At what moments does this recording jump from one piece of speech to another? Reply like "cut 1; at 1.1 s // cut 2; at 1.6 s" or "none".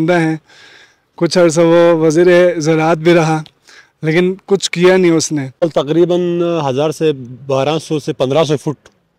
cut 1; at 5.6 s